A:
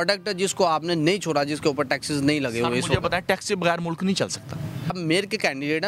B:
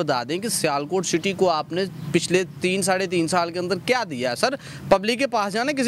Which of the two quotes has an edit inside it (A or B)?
A